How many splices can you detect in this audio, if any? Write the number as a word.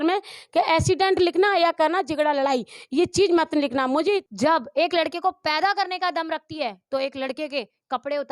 one